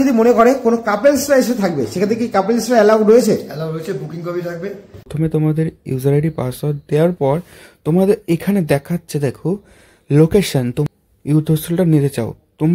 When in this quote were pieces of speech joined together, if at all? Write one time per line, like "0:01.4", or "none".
0:05.1
0:10.9